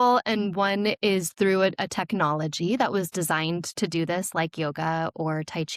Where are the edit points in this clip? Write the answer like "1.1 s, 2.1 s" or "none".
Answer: none